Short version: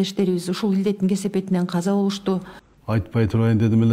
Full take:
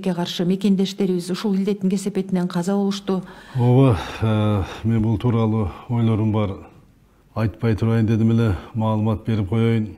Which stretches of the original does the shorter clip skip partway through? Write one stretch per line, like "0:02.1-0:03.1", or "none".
0:03.4-0:07.1